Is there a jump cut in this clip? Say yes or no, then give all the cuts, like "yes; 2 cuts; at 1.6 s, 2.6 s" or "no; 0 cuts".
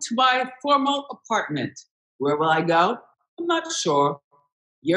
yes; 1 cut; at 2.0 s